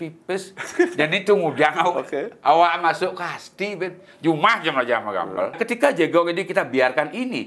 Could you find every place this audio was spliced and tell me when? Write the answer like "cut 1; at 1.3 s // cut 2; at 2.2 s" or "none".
cut 1; at 5.6 s